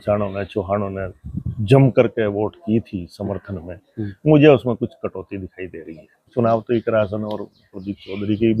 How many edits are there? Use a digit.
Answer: 1